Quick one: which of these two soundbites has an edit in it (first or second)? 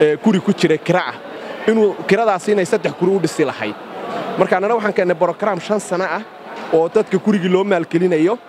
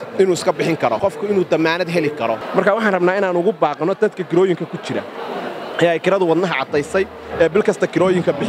second